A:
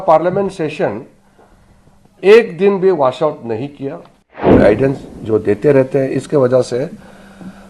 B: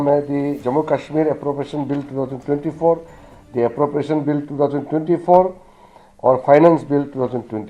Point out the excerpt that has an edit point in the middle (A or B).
A